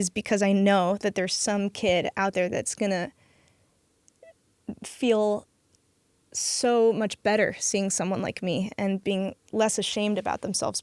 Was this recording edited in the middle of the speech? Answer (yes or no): no